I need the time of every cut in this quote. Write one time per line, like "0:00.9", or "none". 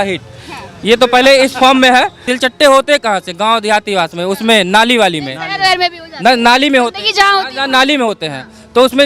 0:02.2